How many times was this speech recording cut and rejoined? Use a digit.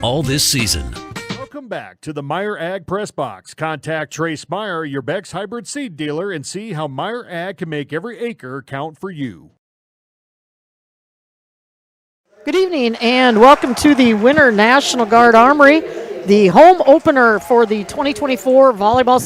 0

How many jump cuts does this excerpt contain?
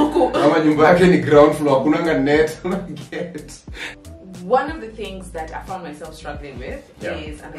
1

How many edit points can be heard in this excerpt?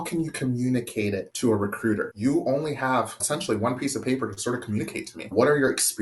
4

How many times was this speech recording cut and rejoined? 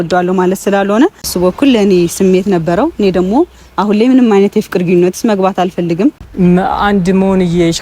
2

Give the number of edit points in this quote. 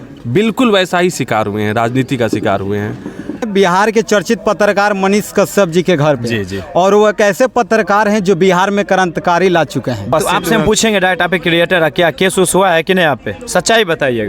2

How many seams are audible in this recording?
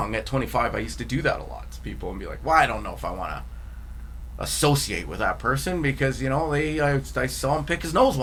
0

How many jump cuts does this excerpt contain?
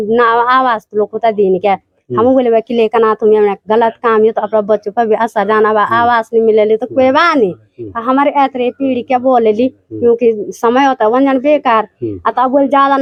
0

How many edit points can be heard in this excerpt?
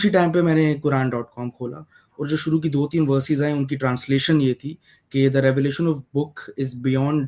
0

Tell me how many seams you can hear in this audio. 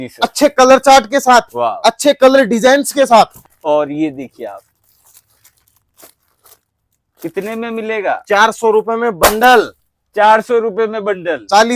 1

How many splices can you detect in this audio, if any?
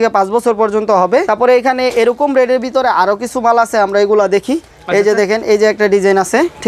2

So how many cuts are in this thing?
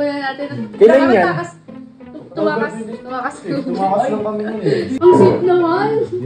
1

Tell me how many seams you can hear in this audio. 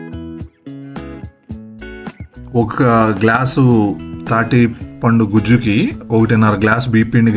1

